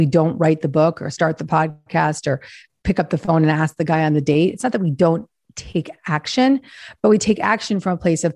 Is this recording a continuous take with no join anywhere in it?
yes; 0 cuts

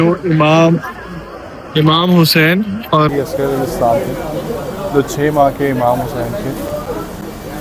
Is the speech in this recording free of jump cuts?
no; 1 cut; at 3.1 s

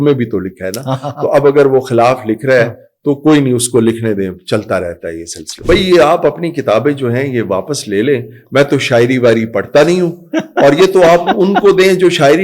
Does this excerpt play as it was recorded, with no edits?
no; 1 cut; at 5.6 s

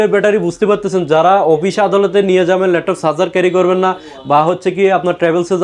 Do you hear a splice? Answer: no; 0 cuts

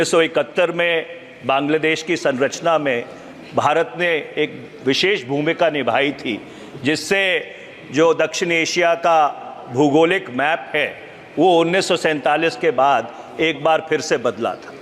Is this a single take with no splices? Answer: yes; 0 cuts

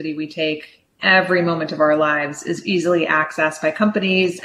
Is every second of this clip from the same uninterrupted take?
no; 1 cut; at 1.0 s

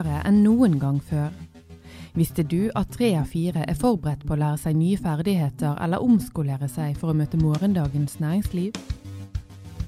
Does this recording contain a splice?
no; 0 cuts

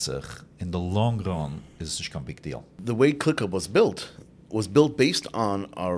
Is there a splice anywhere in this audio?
yes; 1 cut; at 2.7 s

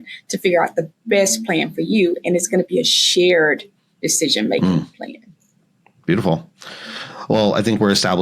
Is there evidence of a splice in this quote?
no; 0 cuts

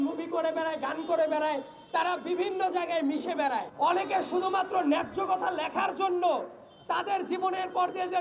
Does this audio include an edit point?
yes; 1 cut; at 3.7 s

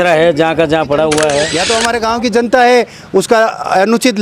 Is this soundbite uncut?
no; 1 cut; at 1.6 s

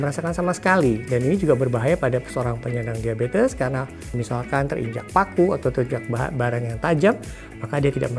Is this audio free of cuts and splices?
yes; 0 cuts

